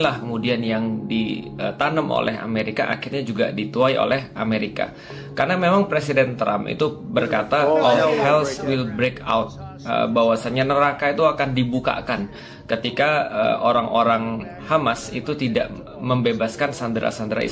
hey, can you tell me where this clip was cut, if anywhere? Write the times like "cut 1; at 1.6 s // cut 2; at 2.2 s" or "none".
none